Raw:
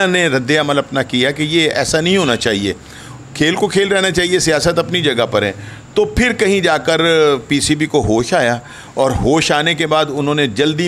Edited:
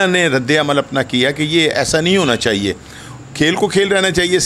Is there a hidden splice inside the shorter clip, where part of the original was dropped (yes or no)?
no